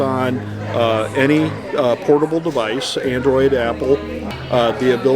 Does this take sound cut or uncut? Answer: cut